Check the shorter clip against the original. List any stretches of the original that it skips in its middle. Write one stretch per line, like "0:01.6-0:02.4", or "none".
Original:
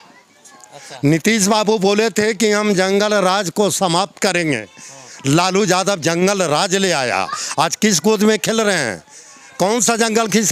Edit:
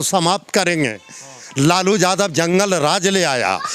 none